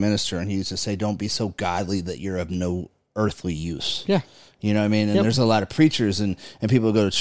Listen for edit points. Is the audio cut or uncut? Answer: uncut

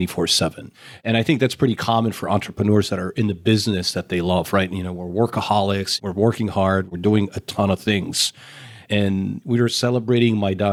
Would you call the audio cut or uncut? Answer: uncut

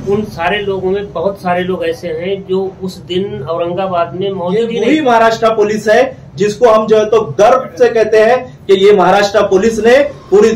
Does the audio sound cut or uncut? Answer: cut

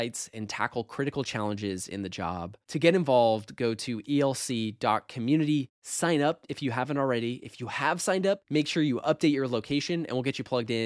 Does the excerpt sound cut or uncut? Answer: uncut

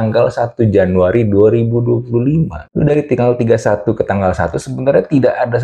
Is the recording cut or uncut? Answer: uncut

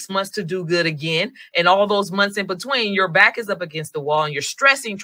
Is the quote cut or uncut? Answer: uncut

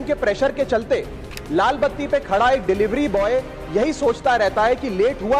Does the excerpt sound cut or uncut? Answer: uncut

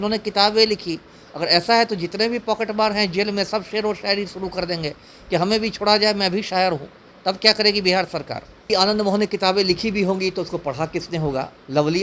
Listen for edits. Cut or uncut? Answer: cut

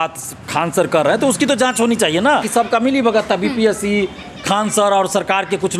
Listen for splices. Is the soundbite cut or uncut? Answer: cut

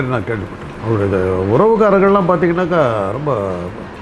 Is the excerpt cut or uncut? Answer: uncut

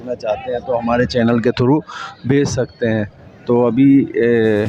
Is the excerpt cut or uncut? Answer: uncut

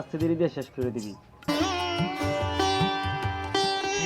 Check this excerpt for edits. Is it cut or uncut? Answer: cut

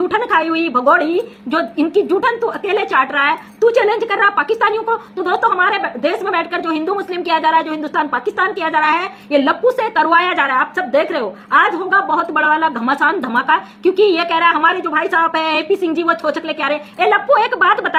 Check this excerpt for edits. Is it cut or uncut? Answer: uncut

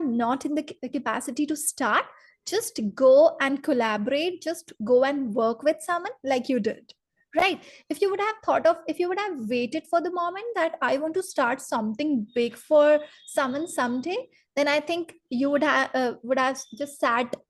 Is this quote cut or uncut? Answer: uncut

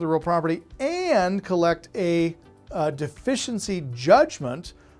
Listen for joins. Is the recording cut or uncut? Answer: uncut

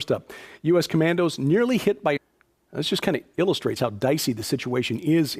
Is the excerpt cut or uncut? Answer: uncut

